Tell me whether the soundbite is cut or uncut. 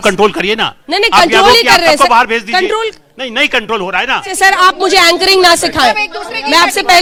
uncut